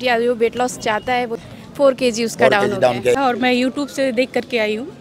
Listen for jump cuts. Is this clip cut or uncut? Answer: cut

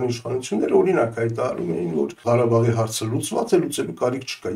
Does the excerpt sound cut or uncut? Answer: cut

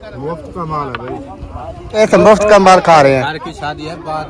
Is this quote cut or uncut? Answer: cut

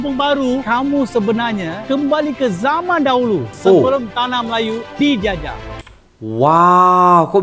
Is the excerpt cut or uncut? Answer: uncut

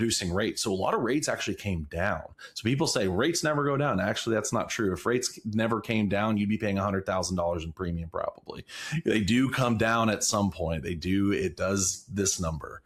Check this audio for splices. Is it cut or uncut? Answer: uncut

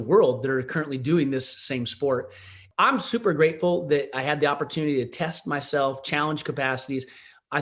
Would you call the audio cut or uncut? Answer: cut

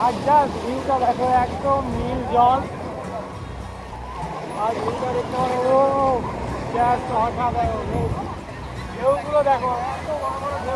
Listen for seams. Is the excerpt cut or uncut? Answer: uncut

